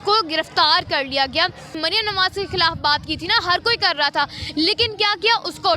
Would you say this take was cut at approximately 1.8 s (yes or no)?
yes